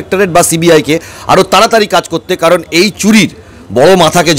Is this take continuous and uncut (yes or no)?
yes